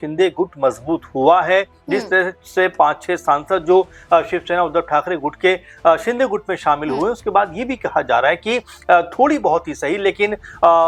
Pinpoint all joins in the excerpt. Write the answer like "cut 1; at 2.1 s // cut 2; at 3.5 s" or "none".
none